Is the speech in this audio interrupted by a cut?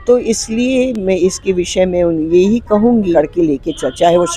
yes; 1 cut; at 3.1 s

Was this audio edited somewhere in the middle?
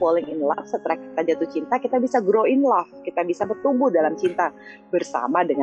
no; 0 cuts

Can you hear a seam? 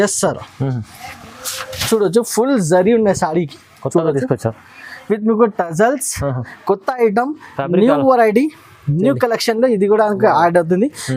no; 0 cuts

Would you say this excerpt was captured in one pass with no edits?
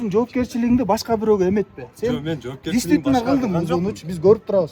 yes; 0 cuts

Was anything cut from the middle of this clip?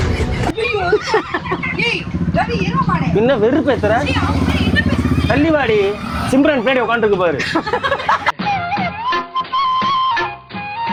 no; 0 cuts

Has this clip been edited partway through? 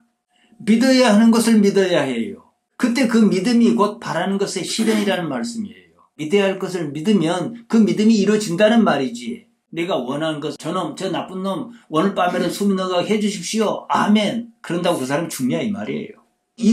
no; 0 cuts

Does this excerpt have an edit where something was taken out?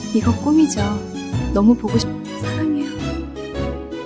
yes; 1 cut; at 2.0 s

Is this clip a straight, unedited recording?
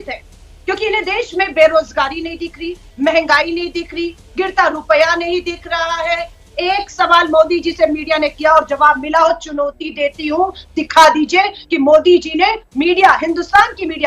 no; 1 cut; at 6.4 s

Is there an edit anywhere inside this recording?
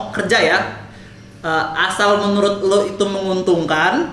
no; 0 cuts

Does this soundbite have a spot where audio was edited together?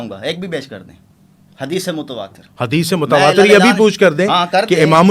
no; 0 cuts

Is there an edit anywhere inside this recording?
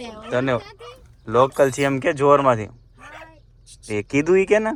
no; 0 cuts

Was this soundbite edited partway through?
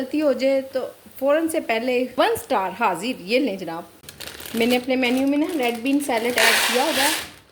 yes; 1 cut; at 3.9 s

